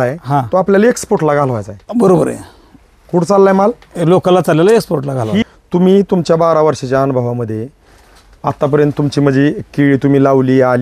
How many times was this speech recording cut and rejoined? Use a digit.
1